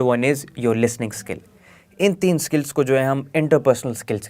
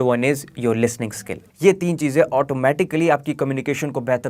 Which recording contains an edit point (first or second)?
second